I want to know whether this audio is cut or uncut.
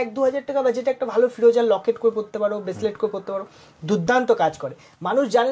uncut